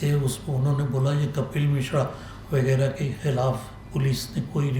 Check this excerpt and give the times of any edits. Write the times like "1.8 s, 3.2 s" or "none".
3.7 s